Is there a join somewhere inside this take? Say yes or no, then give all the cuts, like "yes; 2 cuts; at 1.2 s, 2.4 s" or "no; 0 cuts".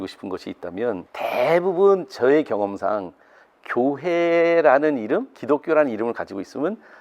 yes; 1 cut; at 1.1 s